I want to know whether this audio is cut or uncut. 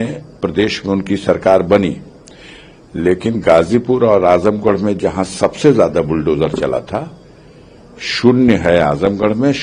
uncut